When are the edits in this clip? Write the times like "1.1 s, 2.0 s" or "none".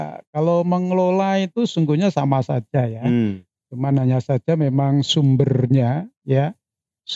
none